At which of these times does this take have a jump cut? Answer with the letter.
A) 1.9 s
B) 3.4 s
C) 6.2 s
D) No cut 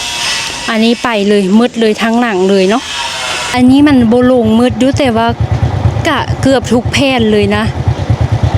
B